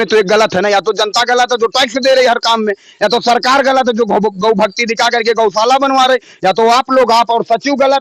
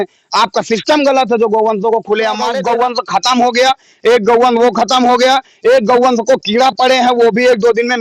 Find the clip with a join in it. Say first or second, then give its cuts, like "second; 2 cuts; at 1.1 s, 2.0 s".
second; 1 cut; at 2.6 s